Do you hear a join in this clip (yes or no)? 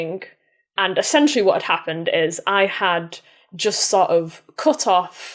no